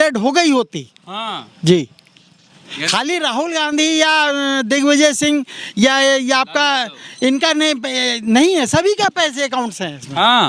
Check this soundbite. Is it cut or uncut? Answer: uncut